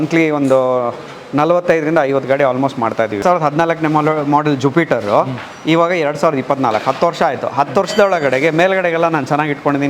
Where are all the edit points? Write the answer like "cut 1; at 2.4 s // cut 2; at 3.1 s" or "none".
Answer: cut 1; at 3.2 s

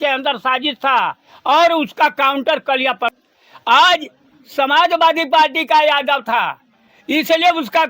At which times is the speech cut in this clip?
cut 1; at 3.1 s

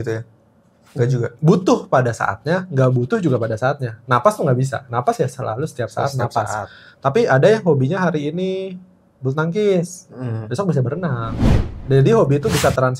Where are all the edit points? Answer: none

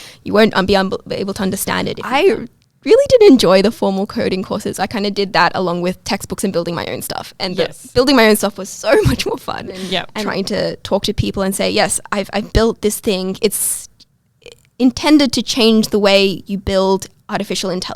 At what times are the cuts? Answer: cut 1; at 2.0 s // cut 2; at 10.2 s

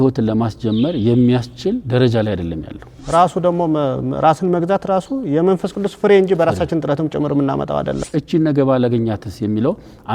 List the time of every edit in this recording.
cut 1; at 3.0 s // cut 2; at 8.0 s

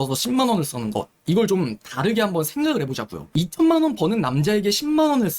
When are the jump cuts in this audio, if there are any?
cut 1; at 3.3 s

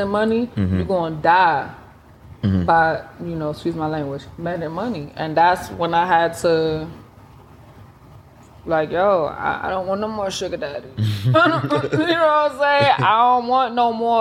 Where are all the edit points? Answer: none

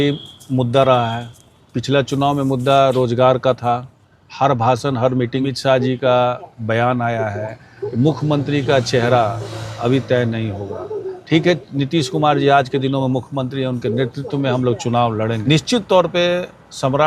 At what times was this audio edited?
cut 1; at 5.5 s // cut 2; at 15.4 s

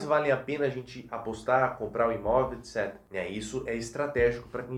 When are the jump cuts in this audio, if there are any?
cut 1; at 3.0 s

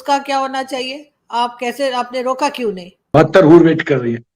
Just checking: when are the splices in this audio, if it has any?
cut 1; at 3.1 s

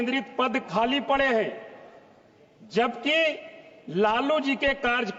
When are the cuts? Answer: none

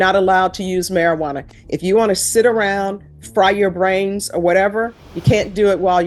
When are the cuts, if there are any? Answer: none

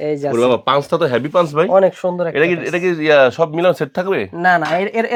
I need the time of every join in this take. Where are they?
none

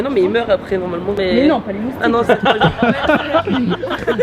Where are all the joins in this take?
none

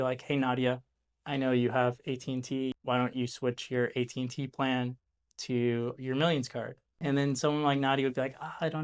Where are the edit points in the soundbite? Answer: cut 1; at 2.7 s // cut 2; at 7.0 s

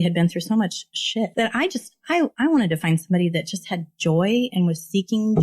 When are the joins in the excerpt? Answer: cut 1; at 1.3 s

